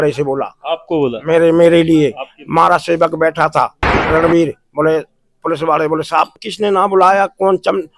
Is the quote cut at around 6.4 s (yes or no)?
yes